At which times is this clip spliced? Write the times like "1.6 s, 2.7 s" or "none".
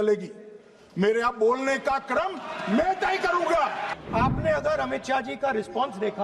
3.9 s